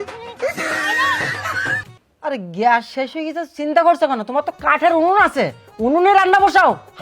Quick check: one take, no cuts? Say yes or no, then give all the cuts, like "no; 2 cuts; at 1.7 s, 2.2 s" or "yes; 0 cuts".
no; 1 cut; at 1.8 s